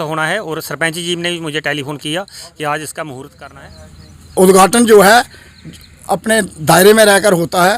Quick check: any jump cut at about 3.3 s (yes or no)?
yes